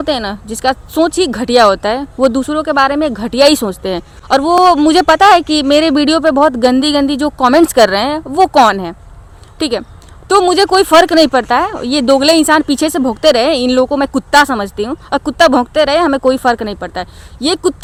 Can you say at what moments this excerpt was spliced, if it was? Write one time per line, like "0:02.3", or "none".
none